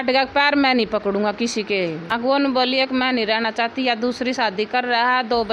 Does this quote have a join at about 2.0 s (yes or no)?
yes